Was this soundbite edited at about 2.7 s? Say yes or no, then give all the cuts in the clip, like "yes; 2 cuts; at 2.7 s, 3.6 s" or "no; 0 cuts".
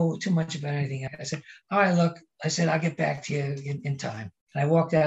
no; 2 cuts; at 1.1 s, 4.0 s